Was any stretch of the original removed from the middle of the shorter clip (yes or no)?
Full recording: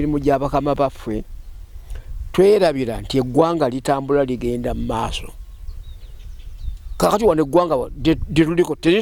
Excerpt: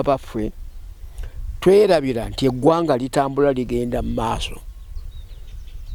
no